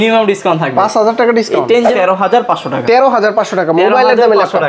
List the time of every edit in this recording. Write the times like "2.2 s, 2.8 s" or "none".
1.9 s